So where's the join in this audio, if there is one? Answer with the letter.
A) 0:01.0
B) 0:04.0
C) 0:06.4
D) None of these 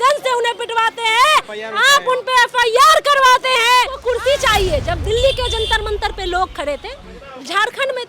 B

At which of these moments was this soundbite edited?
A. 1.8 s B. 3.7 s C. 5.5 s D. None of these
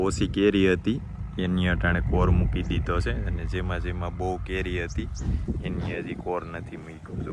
D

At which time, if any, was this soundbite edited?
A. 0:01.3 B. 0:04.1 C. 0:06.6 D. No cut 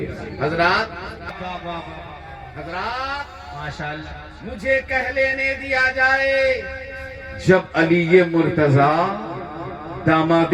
A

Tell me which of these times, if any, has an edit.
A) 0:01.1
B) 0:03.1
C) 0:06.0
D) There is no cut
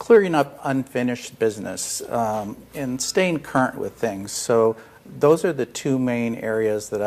B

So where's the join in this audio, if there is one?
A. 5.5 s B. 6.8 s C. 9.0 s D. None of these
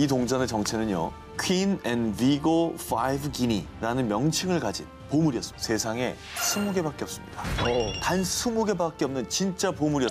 A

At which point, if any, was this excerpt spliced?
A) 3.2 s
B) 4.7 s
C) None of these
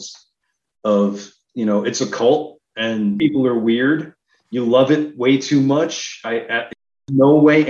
A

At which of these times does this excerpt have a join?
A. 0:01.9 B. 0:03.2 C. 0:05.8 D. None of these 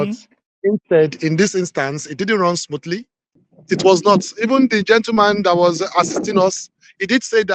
B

